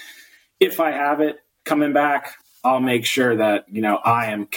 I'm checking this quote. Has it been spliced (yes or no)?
no